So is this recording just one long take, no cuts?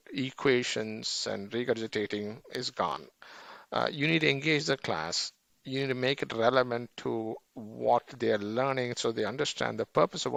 yes; 0 cuts

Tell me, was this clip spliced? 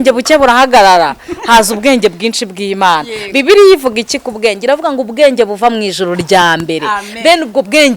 no; 0 cuts

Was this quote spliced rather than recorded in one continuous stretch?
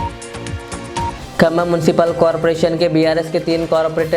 no; 0 cuts

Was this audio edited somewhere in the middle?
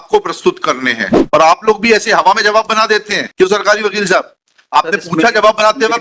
yes; 1 cut; at 1.2 s

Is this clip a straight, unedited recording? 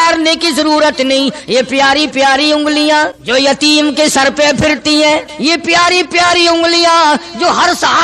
no; 2 cuts; at 3.2 s, 5.3 s

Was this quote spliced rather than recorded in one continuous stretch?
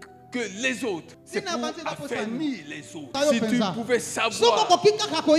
yes; 2 cuts; at 1.2 s, 3.1 s

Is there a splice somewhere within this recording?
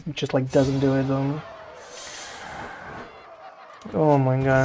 no; 0 cuts

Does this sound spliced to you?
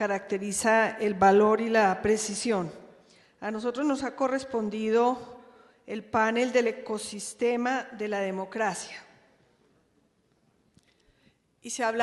no; 0 cuts

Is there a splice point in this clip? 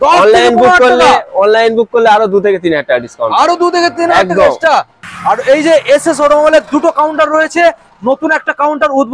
yes; 1 cut; at 5.1 s

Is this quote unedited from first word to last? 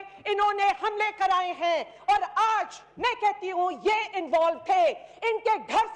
yes; 0 cuts

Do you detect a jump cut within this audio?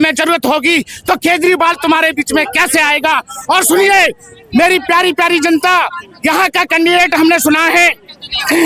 no; 0 cuts

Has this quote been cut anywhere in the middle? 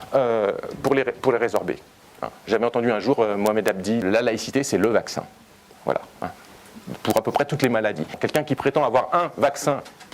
yes; 2 cuts; at 4.0 s, 8.2 s

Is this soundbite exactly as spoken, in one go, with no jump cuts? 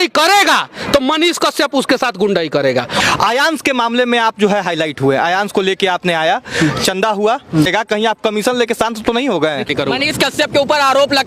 no; 3 cuts; at 3.0 s, 7.7 s, 9.7 s

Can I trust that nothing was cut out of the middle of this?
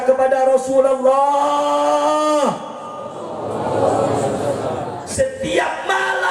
no; 1 cut; at 5.0 s

